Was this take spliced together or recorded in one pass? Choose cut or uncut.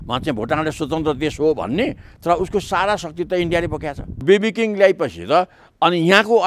cut